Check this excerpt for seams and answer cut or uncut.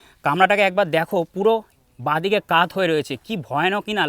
uncut